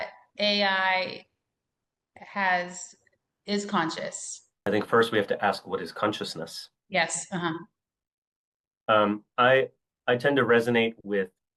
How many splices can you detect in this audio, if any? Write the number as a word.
one